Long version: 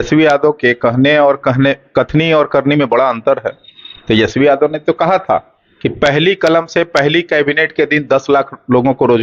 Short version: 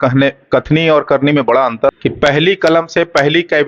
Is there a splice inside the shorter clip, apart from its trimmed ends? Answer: yes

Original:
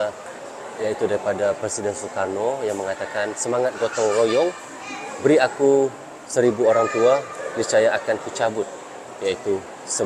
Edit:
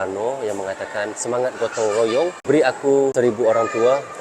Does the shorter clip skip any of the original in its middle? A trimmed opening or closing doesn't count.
yes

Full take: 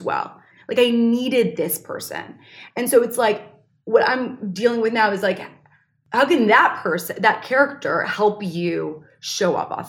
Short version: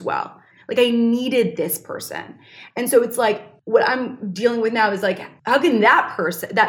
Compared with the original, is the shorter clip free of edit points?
no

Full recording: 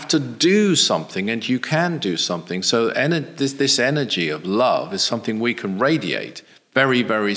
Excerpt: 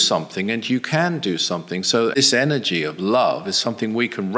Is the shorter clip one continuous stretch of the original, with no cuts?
no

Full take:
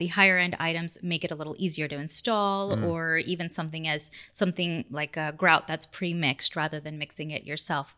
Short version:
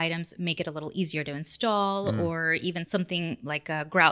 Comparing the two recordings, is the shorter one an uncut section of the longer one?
no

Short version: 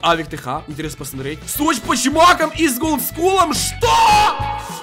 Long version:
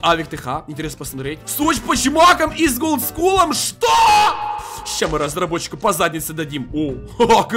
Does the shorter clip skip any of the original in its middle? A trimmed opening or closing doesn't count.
no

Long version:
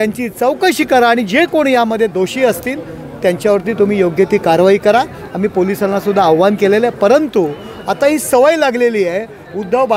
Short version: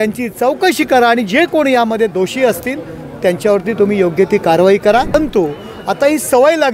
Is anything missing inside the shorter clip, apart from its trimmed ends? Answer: yes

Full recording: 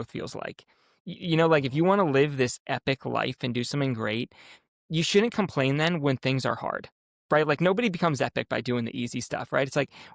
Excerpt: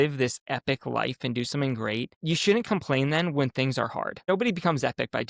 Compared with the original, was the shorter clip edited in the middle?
yes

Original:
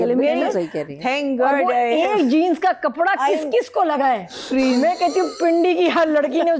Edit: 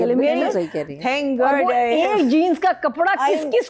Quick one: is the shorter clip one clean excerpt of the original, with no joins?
yes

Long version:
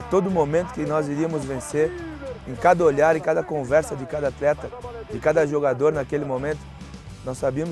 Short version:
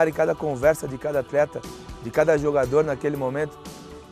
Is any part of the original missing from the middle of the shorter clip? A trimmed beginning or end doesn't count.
no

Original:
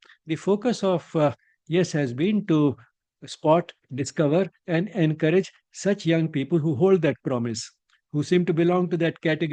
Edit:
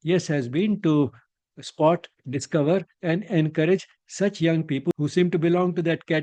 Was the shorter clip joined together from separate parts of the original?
yes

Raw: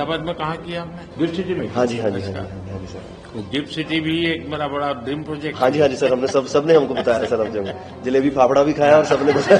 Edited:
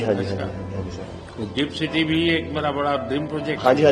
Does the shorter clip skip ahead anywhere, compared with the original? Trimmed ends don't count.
no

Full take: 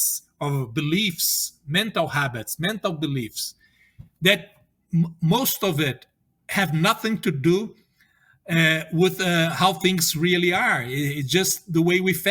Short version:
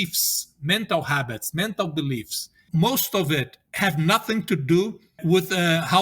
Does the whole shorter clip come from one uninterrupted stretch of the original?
no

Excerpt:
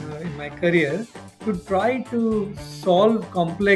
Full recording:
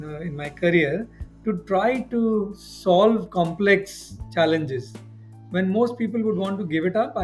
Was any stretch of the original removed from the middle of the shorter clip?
no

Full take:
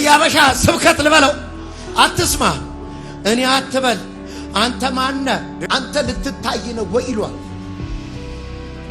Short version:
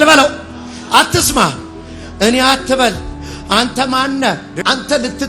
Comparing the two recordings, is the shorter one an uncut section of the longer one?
yes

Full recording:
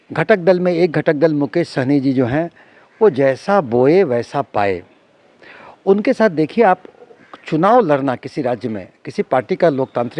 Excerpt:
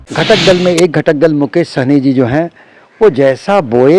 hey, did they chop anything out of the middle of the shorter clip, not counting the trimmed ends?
no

